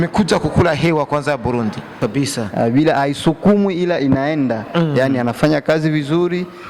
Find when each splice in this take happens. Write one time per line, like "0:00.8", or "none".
0:02.0